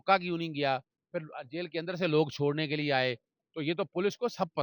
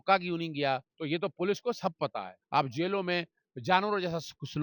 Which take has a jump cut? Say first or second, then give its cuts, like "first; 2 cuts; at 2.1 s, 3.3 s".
second; 2 cuts; at 0.9 s, 2.4 s